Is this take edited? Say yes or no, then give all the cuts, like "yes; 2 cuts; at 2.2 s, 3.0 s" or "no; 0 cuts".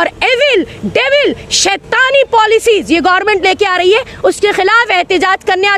no; 0 cuts